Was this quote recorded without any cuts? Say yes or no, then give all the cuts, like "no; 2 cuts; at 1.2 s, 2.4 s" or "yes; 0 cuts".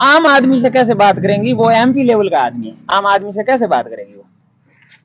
yes; 0 cuts